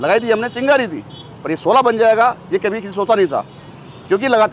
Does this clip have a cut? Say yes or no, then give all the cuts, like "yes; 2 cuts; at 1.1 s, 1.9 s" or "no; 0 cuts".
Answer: no; 0 cuts